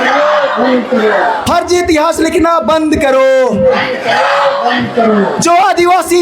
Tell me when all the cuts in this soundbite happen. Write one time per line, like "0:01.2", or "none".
none